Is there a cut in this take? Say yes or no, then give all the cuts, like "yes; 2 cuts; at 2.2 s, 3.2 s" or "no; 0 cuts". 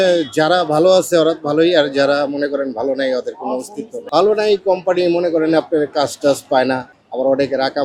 no; 0 cuts